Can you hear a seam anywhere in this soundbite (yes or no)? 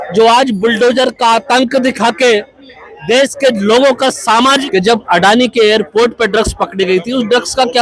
yes